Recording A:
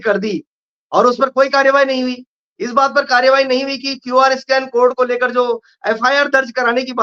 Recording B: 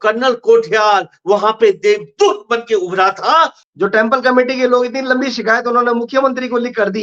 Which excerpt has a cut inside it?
B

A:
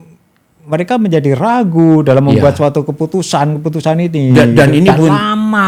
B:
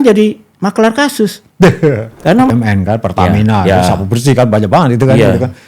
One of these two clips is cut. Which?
B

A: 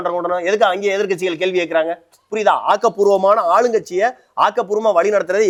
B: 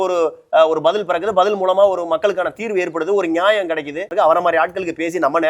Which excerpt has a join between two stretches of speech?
B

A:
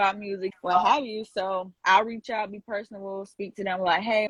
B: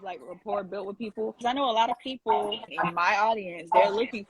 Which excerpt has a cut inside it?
B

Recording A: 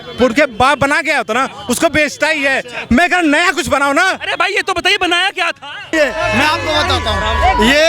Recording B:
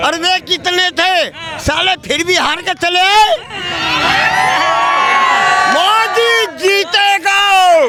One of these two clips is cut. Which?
A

